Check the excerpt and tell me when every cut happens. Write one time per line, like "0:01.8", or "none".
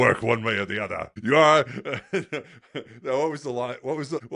none